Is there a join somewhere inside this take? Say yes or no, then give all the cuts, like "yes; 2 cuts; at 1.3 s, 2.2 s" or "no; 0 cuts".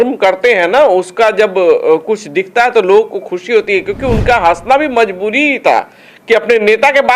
no; 0 cuts